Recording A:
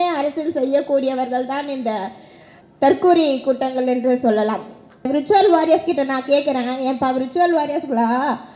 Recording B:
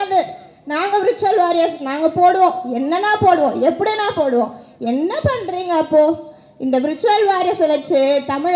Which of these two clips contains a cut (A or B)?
A